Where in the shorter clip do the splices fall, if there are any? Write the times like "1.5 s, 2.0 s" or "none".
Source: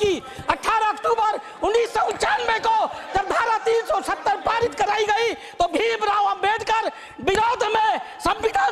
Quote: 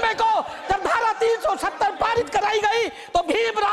none